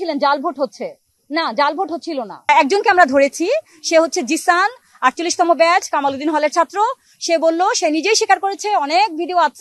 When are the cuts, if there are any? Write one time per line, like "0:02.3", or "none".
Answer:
0:02.5